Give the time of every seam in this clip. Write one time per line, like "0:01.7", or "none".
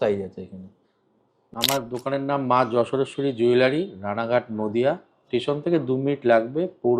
0:01.4